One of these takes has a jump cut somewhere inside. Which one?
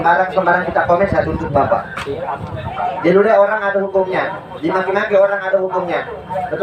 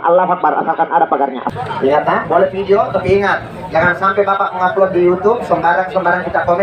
second; 1 cut; at 1.5 s

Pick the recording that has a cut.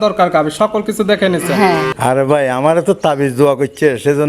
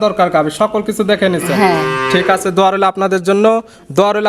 first; 1 cut; at 1.9 s

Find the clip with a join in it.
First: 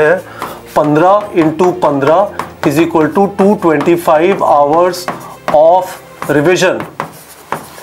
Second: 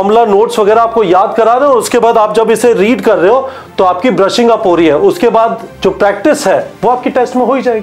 second; 2 cuts; at 5.7 s, 6.7 s

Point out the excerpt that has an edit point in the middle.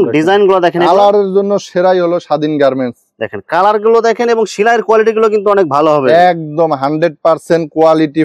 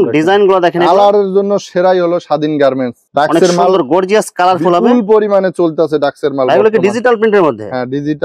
second; 1 cut; at 3.0 s

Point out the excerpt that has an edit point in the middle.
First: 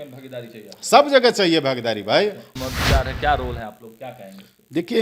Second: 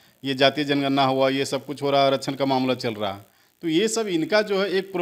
first; 1 cut; at 2.5 s

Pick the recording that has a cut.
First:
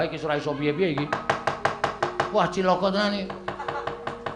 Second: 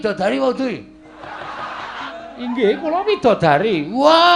second; 1 cut; at 2.1 s

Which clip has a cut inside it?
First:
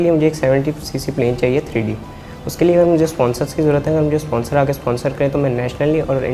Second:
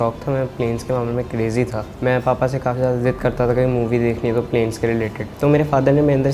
second; 2 cuts; at 1.9 s, 5.2 s

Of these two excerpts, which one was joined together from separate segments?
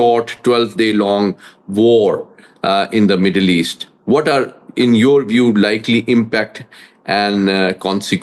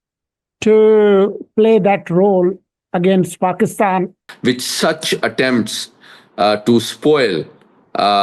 second; 1 cut; at 4.2 s

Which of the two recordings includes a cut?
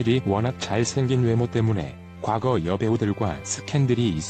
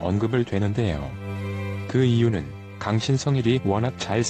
second; 1 cut; at 1.3 s

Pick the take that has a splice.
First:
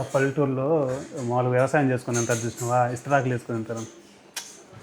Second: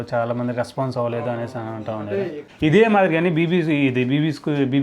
second; 1 cut; at 2.4 s

